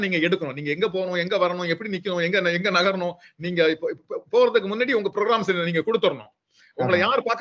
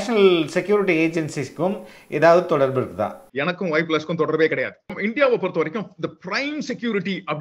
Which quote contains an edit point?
second; 2 cuts; at 3.2 s, 5.0 s

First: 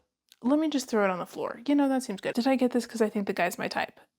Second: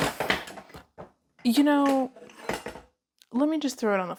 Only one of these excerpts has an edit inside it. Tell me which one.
first; 1 cut; at 2.3 s

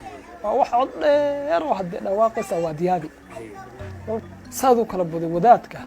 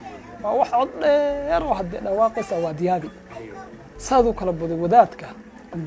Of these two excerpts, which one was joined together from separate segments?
second; 1 cut; at 3.9 s

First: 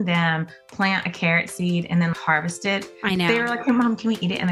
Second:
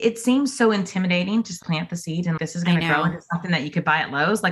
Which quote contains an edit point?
second; 1 cut; at 1.6 s

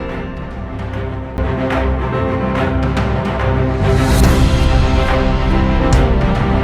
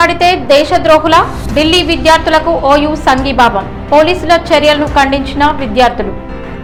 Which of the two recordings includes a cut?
first; 1 cut; at 1.2 s

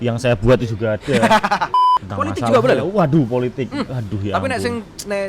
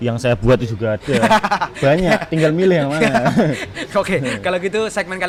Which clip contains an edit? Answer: first; 1 cut; at 1.7 s

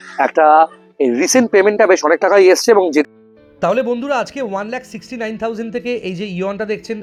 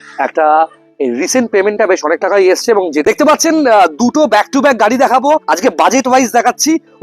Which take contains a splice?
second; 1 cut; at 3.0 s

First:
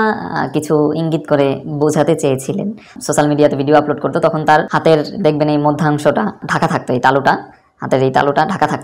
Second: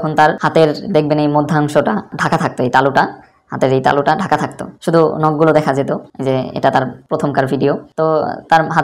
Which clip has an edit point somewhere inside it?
first; 1 cut; at 2.9 s

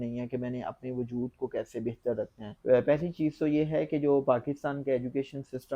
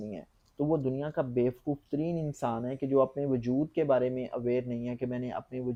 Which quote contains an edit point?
first; 1 cut; at 2.4 s

